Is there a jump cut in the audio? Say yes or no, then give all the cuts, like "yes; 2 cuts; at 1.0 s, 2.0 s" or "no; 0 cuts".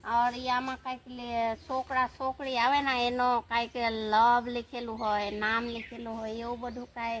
no; 0 cuts